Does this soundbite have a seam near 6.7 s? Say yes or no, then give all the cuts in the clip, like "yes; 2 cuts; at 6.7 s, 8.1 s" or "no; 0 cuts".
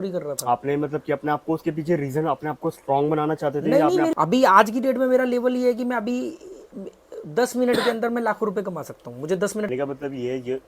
no; 2 cuts; at 4.1 s, 9.7 s